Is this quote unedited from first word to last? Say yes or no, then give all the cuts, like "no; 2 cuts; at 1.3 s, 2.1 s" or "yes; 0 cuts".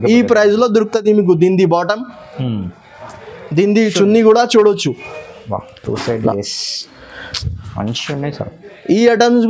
yes; 0 cuts